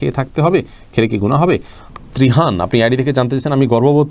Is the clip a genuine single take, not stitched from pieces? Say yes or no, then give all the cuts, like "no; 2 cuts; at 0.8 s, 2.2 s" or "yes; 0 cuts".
no; 1 cut; at 1.8 s